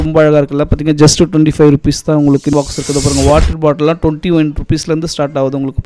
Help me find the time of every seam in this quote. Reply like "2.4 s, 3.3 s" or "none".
2.5 s